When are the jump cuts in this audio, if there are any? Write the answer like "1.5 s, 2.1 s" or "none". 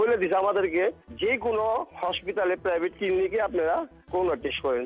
1.0 s